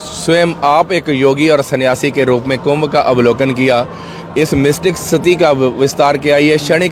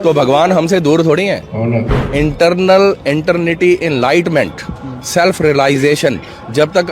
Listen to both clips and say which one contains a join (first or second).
second